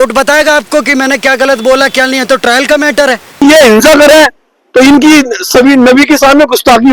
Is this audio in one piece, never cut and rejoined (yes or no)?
no